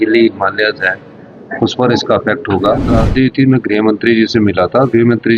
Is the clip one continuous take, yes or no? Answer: no